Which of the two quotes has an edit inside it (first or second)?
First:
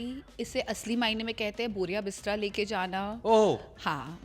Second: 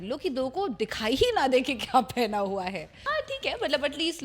second